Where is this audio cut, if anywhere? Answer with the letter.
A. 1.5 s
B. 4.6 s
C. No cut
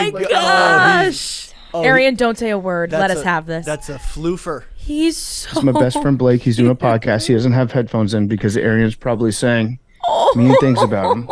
C